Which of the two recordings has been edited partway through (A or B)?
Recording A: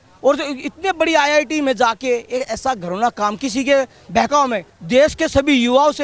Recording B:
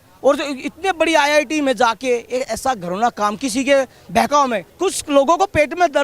B